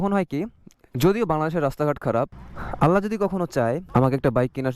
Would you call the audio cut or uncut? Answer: cut